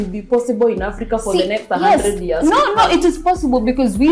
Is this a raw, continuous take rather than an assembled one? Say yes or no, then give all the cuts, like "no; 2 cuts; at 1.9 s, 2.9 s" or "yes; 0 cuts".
yes; 0 cuts